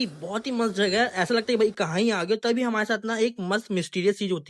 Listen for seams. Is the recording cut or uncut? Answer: uncut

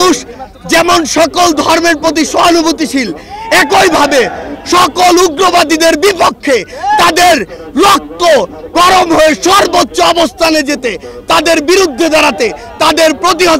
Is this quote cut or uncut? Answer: uncut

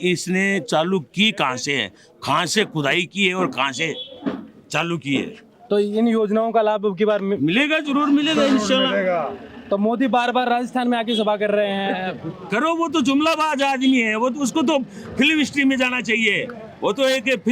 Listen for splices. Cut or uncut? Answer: uncut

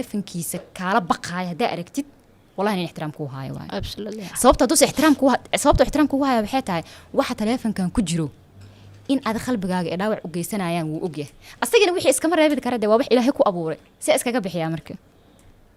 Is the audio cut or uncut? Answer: uncut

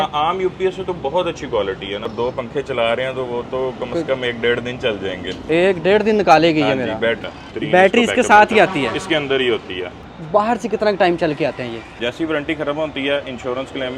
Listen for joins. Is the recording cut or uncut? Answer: cut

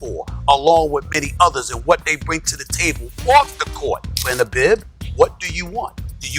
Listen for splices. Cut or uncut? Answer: cut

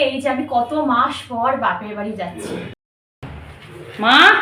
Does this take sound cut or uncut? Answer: cut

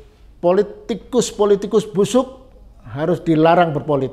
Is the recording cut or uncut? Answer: uncut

